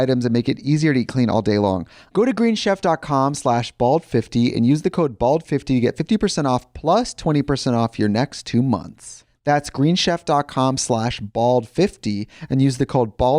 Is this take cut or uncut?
cut